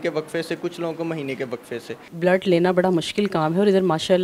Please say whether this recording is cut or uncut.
cut